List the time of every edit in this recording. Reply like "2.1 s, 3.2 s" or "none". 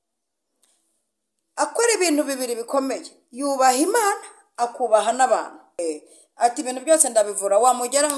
5.8 s